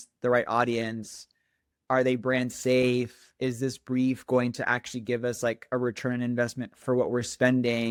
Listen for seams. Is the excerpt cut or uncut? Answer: uncut